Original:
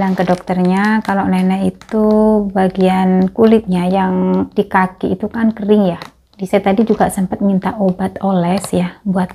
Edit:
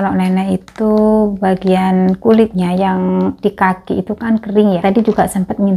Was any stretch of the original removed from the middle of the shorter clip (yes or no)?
yes